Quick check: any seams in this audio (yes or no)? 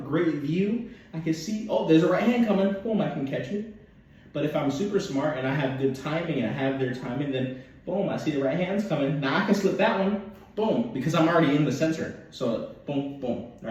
no